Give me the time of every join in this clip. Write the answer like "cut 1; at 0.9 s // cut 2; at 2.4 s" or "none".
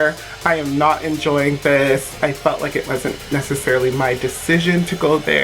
cut 1; at 2.1 s